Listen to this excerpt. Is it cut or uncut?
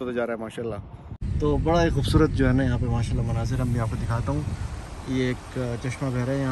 cut